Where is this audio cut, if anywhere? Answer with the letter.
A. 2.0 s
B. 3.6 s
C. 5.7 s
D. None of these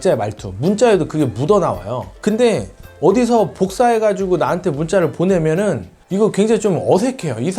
D